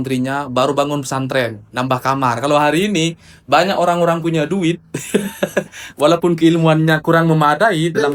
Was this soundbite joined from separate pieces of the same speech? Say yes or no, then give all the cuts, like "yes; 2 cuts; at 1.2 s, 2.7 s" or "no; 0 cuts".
no; 0 cuts